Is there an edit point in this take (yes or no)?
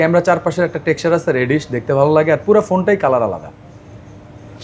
no